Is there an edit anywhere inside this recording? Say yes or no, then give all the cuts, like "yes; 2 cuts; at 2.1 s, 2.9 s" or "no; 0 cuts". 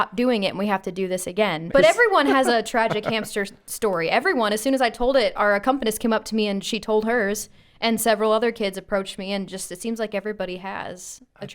yes; 1 cut; at 1.7 s